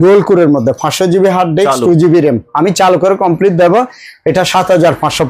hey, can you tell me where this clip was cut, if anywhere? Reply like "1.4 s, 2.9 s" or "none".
none